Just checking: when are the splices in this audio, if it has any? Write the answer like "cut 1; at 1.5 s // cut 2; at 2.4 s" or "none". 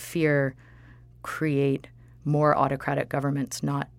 none